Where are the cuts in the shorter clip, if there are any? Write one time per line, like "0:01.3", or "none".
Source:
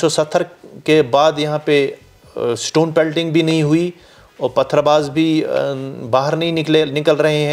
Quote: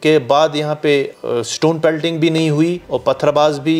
0:01.2
0:02.9